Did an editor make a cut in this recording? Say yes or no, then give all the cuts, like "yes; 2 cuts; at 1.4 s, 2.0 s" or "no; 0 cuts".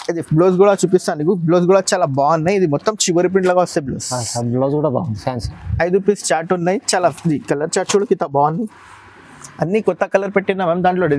no; 0 cuts